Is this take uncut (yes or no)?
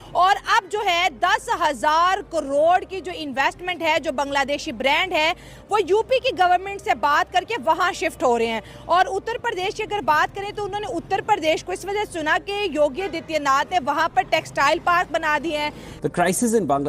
no